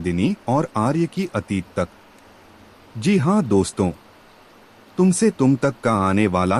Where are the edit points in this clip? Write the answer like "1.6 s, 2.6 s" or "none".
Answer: none